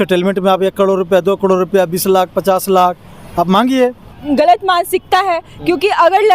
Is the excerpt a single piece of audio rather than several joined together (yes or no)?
no